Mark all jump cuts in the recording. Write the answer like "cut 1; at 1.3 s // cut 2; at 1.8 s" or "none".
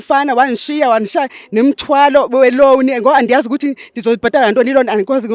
none